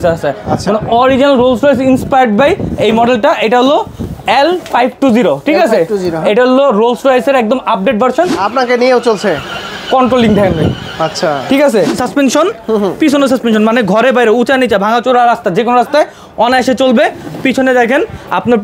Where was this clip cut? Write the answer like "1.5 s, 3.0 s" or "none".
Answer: 8.4 s, 12.0 s